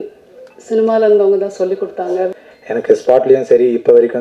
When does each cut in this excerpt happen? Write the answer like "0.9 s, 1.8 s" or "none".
2.3 s